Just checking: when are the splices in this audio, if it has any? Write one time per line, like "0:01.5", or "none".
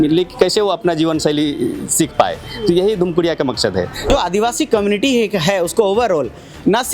0:04.1